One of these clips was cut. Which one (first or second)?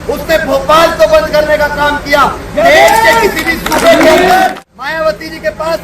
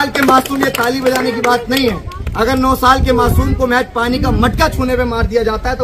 first